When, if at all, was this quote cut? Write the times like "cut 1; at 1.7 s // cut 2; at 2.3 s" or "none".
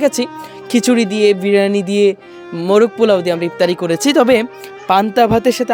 none